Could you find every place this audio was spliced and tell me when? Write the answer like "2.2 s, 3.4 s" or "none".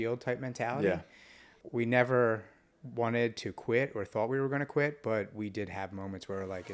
1.5 s